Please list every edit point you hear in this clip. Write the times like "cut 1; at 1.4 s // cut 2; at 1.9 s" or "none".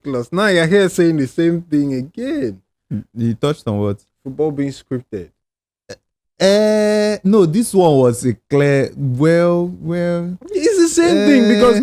none